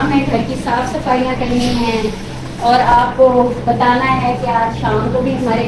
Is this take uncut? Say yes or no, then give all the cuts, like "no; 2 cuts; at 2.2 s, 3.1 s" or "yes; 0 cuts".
yes; 0 cuts